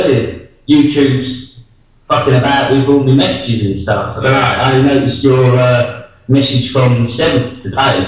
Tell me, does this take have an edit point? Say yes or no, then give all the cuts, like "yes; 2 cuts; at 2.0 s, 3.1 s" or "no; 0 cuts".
yes; 1 cut; at 6.5 s